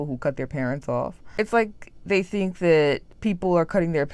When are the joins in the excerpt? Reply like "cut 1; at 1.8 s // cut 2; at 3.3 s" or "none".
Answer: cut 1; at 1.2 s // cut 2; at 3.1 s